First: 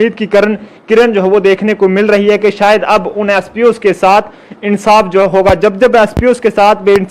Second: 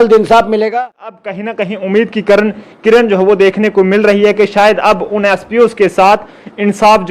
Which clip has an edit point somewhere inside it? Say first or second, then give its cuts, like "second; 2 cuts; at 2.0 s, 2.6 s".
second; 1 cut; at 1.0 s